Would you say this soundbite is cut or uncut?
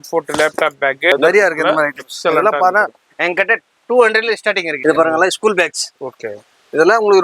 cut